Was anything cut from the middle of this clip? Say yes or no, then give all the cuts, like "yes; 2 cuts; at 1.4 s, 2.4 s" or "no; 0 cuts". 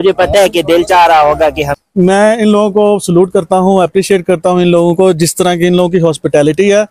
yes; 1 cut; at 1.7 s